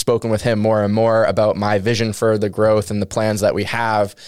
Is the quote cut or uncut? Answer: uncut